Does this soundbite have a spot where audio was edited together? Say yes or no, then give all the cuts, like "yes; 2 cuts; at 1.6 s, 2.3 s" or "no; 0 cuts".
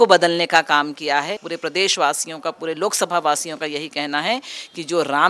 yes; 1 cut; at 1.5 s